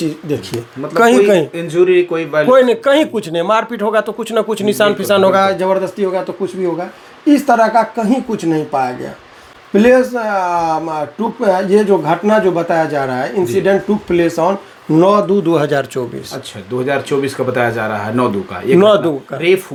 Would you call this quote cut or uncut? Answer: uncut